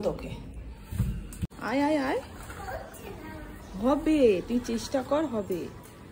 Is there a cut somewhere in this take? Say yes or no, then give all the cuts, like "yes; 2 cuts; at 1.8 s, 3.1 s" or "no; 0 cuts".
yes; 1 cut; at 1.4 s